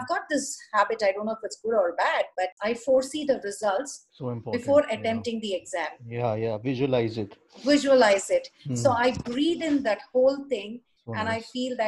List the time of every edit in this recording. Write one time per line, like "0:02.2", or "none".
0:02.5